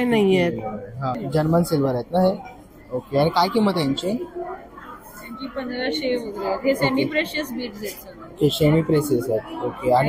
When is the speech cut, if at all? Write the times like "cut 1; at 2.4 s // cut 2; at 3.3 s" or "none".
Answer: cut 1; at 1.2 s